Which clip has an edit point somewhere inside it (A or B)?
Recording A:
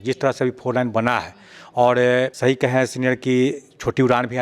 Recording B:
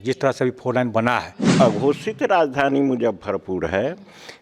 B